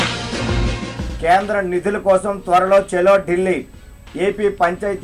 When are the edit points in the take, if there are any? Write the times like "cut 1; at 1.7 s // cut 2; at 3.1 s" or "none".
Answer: none